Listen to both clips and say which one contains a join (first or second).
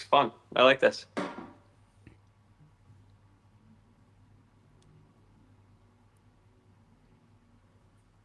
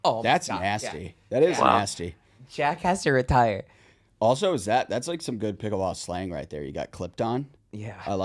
first